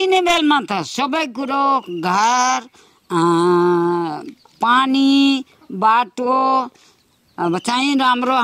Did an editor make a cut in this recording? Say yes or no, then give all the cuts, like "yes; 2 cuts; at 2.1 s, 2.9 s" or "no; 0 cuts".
no; 0 cuts